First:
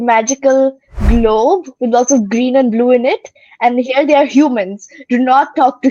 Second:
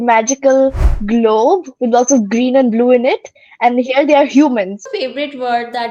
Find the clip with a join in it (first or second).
second